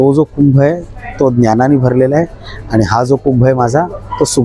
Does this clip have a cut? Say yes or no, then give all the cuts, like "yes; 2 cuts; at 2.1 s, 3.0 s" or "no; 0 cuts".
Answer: no; 0 cuts